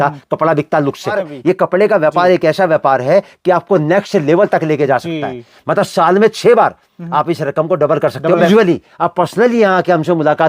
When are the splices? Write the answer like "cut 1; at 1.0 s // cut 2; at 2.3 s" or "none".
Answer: cut 1; at 1.3 s // cut 2; at 8.5 s